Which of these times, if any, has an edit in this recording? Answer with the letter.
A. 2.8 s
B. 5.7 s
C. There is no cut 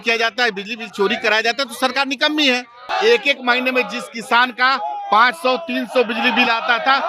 A